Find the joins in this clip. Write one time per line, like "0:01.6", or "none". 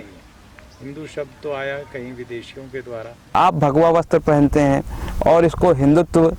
0:03.1